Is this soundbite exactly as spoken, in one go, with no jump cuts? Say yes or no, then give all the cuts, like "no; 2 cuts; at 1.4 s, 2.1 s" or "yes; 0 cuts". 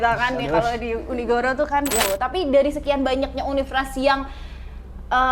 no; 1 cut; at 2.0 s